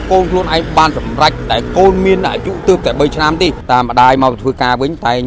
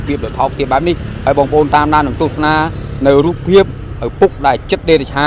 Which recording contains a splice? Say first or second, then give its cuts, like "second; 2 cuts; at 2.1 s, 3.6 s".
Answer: first; 1 cut; at 3.6 s